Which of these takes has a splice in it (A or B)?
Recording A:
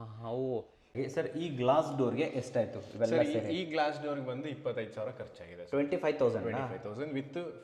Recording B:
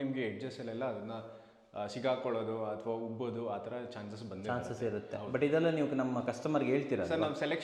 A